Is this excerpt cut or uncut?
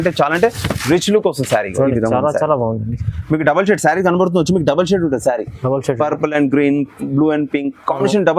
uncut